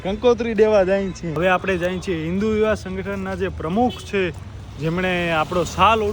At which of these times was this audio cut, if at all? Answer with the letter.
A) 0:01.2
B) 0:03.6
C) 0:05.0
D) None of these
A